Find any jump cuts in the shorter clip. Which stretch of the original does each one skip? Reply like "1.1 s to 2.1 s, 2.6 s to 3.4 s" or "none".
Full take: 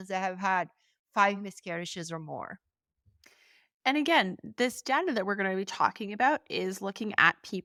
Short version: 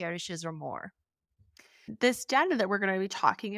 3.5 s to 4.4 s